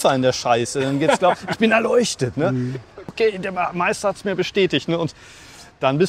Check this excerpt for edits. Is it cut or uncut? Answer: cut